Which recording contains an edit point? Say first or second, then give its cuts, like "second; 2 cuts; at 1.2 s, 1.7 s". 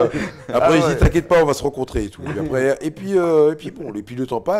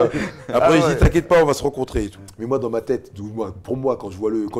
second; 1 cut; at 2.2 s